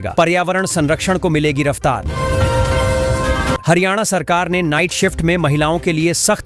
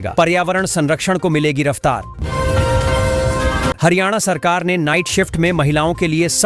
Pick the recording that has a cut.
second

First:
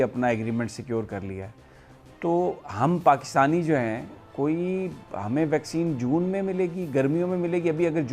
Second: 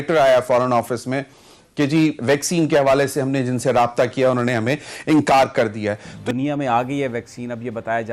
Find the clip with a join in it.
second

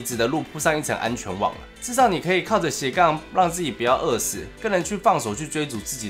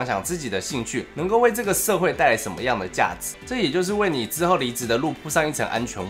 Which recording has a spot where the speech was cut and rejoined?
second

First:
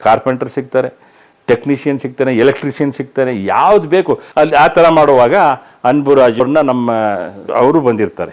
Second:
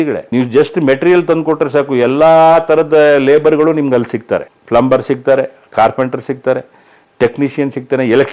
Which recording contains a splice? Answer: first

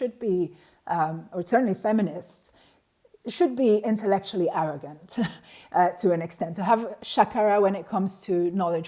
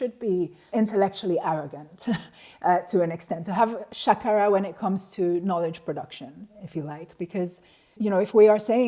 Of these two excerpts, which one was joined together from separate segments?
second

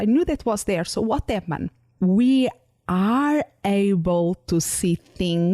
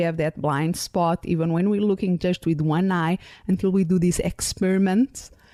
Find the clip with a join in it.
first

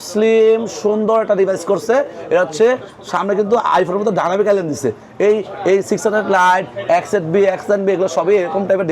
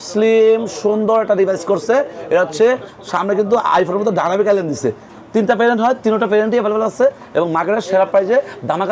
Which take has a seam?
second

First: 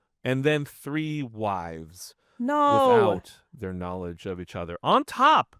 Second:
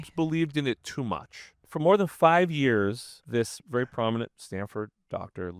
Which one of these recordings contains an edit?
second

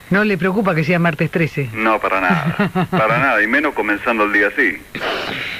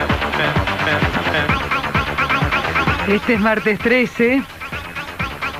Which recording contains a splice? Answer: first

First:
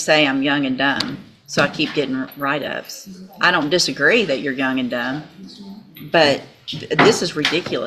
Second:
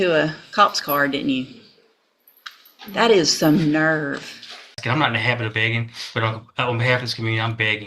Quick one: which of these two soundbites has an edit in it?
second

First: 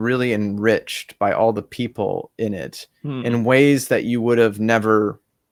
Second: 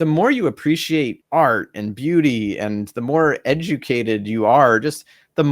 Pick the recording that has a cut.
second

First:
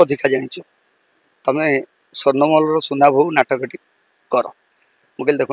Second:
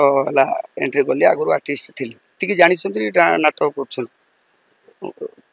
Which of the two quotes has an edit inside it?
second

